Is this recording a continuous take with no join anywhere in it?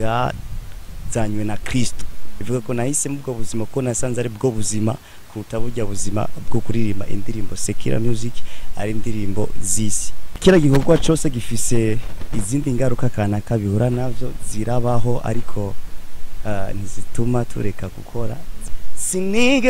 no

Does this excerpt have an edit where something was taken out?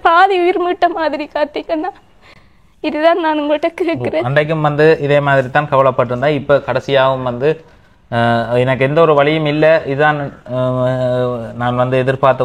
no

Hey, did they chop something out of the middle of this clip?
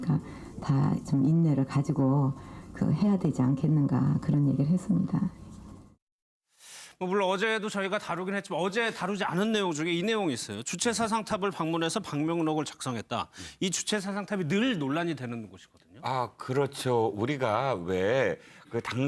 no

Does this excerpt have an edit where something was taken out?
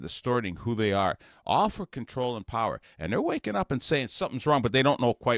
no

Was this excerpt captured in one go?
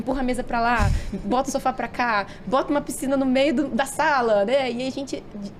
yes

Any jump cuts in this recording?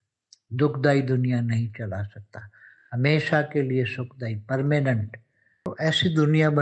yes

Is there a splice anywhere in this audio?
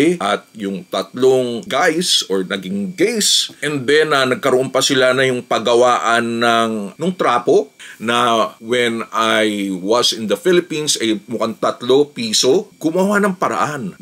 yes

